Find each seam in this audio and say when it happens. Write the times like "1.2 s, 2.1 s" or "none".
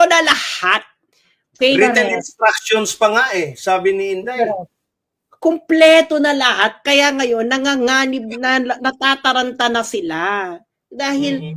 none